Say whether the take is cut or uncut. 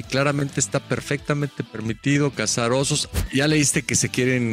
cut